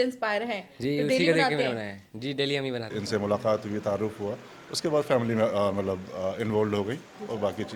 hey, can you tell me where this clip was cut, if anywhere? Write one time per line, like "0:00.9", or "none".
0:02.9